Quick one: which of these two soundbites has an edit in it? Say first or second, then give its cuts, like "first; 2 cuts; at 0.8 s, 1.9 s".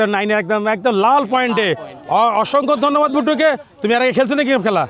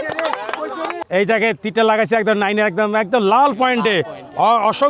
second; 1 cut; at 0.9 s